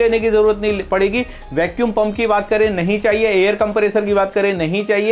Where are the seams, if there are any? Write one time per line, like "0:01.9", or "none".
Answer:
none